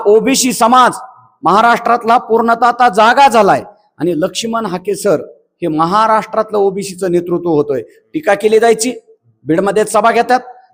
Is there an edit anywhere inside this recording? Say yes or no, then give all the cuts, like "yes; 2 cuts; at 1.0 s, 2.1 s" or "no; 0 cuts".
no; 0 cuts